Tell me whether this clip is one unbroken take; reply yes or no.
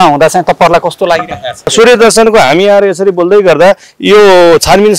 no